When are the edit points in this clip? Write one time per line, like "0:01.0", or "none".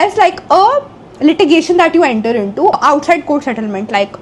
0:02.8